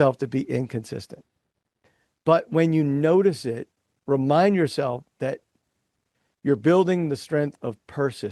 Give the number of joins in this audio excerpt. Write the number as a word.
zero